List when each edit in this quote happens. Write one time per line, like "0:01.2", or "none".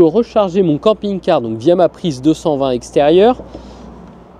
none